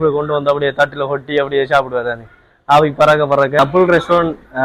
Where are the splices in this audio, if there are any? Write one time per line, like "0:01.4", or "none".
0:03.6